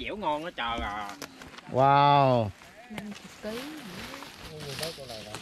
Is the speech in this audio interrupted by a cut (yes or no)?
yes